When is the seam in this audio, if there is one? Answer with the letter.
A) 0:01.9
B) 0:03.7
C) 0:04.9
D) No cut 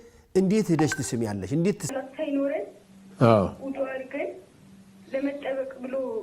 A